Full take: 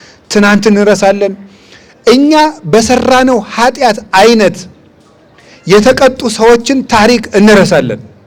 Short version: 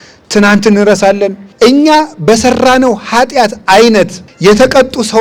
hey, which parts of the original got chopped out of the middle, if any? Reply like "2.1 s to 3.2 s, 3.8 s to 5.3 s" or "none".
1.4 s to 1.9 s, 4.7 s to 5.5 s

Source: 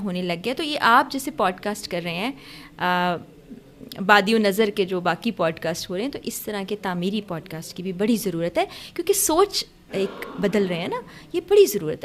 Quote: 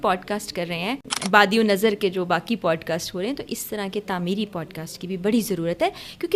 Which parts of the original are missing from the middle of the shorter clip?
2.5 s to 3.9 s

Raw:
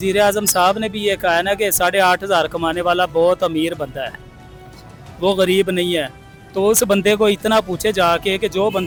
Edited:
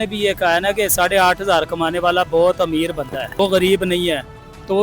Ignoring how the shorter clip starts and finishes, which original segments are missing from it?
4.1 s to 5.2 s

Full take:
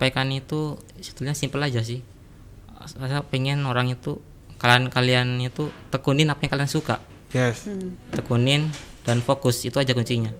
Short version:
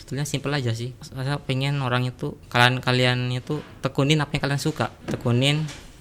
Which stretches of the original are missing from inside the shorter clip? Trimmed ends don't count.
2.1 s to 2.9 s, 4.2 s to 4.5 s, 7.1 s to 8.0 s

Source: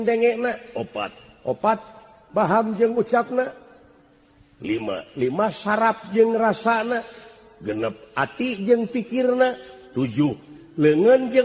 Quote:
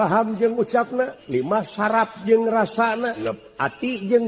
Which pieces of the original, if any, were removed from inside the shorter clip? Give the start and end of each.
3.6 s to 5.1 s, 7.1 s to 7.8 s

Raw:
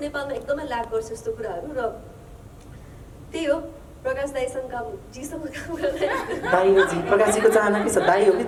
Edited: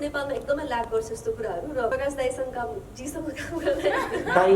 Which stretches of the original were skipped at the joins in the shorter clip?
1.9 s to 4.1 s

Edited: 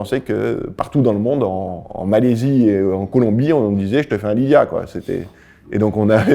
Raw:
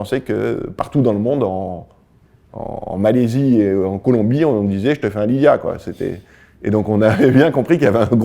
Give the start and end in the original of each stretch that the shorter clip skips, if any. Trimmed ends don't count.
1.9 s to 2.8 s

